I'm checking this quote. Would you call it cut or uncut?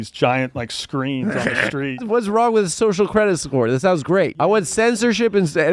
cut